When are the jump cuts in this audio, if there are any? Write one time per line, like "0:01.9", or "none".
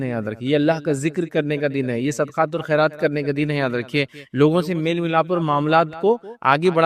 none